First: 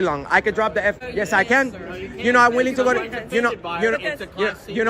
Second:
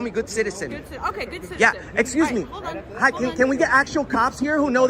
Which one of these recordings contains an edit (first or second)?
first